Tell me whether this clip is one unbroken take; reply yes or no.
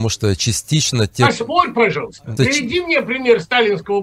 no